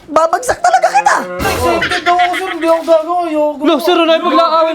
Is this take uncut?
no; 1 cut; at 1.4 s

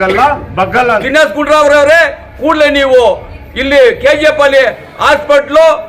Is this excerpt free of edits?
no; 1 cut; at 1.1 s

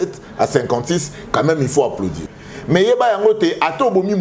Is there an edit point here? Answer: yes; 1 cut; at 2.2 s

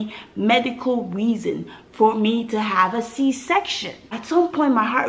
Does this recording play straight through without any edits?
no; 1 cut; at 4.1 s

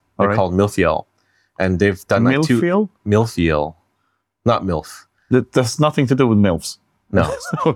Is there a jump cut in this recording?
no; 0 cuts

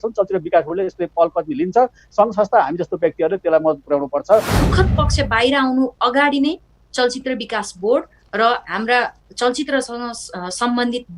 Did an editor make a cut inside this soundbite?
yes; 1 cut; at 4.6 s

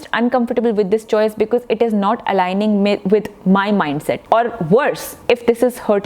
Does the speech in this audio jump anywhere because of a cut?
yes; 2 cuts; at 4.2 s, 5.1 s

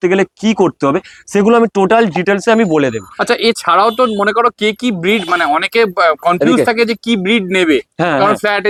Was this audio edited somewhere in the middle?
no; 0 cuts

